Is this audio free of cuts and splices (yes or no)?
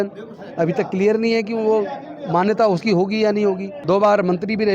no